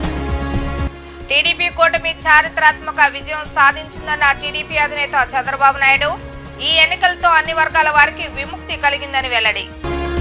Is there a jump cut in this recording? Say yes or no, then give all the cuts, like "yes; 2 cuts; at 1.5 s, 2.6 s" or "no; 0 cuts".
yes; 1 cut; at 0.9 s